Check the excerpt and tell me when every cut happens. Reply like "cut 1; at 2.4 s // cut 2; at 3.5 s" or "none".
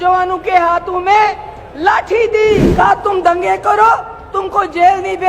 cut 1; at 2.7 s